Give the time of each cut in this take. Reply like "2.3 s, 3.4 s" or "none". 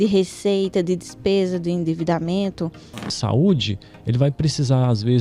3.0 s